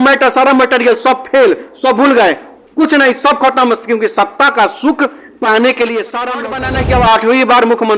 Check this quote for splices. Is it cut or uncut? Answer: cut